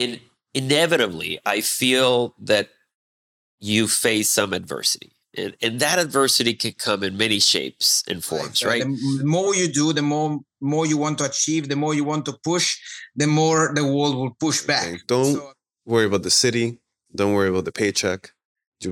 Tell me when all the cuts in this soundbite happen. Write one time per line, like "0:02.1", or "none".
0:08.8
0:14.9